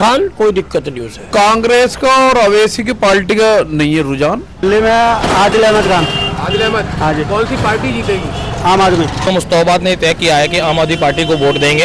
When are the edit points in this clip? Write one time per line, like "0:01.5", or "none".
0:01.2
0:04.5
0:09.3